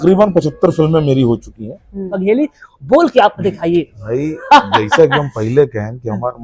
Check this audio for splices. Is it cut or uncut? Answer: cut